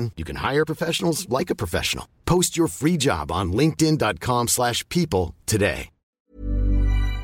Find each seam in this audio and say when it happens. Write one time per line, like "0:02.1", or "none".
0:06.3